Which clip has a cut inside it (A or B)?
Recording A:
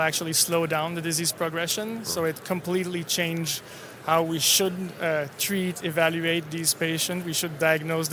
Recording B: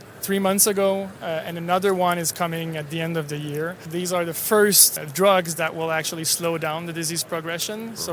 B